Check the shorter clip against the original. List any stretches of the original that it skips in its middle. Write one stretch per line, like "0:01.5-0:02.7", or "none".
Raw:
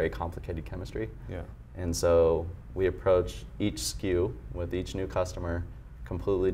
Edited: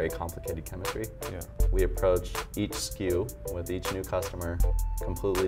0:01.6-0:02.6

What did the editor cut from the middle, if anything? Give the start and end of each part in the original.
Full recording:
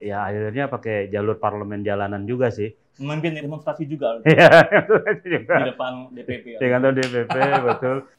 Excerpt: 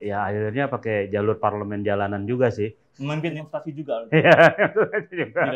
0:03.4-0:03.5

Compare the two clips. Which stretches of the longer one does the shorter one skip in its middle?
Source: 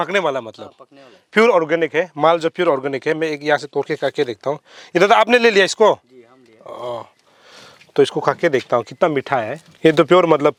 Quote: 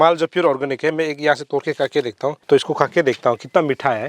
0:04.6-0:07.9

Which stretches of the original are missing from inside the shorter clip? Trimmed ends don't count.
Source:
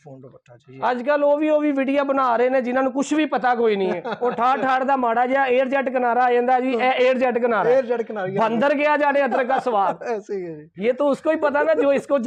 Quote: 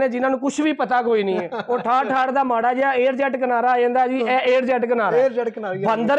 none

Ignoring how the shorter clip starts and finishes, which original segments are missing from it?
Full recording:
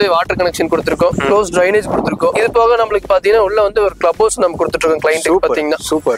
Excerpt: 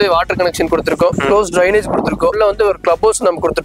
0:02.3-0:03.5

